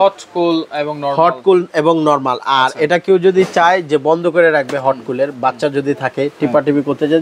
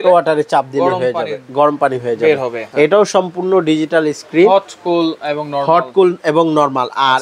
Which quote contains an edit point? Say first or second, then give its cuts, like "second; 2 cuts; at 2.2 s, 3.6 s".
second; 1 cut; at 2.6 s